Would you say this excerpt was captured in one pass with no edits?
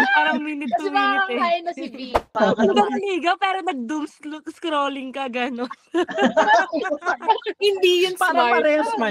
no; 1 cut; at 2.2 s

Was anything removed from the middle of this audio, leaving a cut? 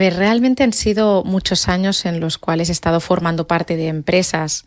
no; 0 cuts

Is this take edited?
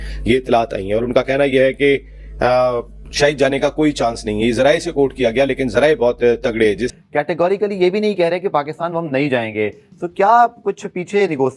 yes; 1 cut; at 6.9 s

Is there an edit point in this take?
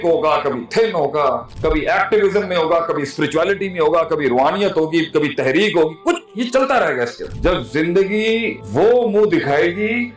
yes; 1 cut; at 7.3 s

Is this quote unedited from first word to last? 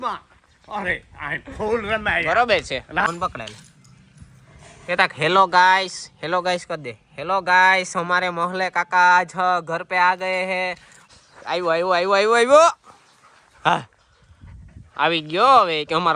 no; 2 cuts; at 3.1 s, 11.0 s

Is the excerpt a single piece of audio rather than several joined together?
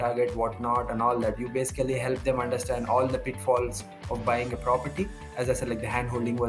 no; 1 cut; at 5.3 s

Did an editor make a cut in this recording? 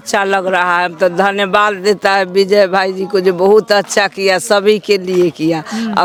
no; 0 cuts

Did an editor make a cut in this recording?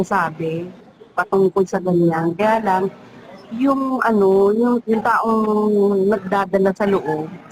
yes; 1 cut; at 4.8 s

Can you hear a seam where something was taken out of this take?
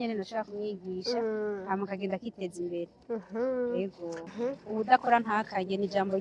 yes; 1 cut; at 4.3 s

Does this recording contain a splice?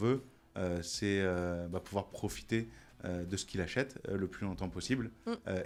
no; 0 cuts

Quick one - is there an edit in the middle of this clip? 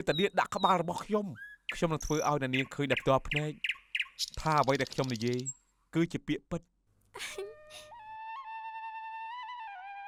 no; 0 cuts

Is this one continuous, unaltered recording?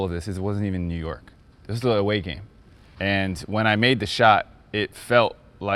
yes; 0 cuts

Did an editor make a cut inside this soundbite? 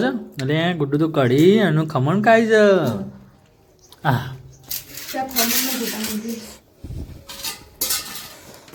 no; 0 cuts

